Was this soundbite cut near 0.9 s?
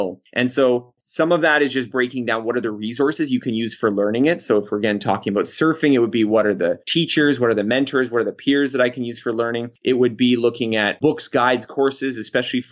no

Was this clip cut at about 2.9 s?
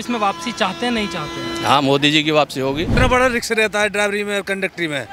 yes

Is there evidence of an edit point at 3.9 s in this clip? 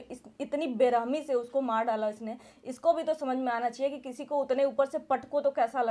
no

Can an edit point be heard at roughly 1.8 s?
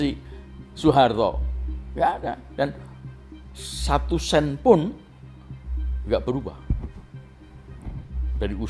no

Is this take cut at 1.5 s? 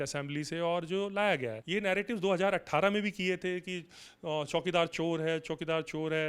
yes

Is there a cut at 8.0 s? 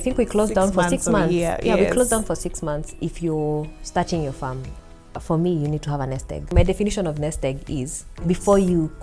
yes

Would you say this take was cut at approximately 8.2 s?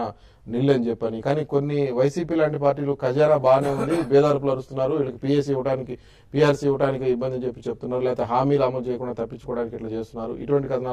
yes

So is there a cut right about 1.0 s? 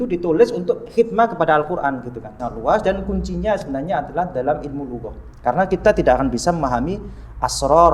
no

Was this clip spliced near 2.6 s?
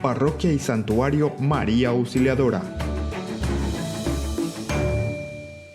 yes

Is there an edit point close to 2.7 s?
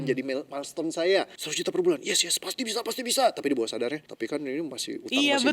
no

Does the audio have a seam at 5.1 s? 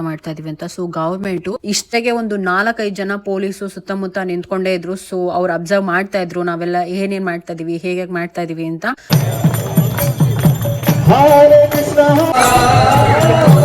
no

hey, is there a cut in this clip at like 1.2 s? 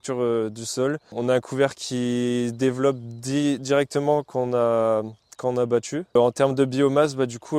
yes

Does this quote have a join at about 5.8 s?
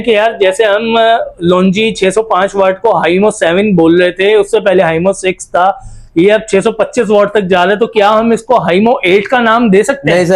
no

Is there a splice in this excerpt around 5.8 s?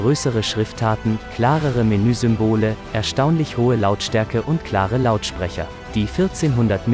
yes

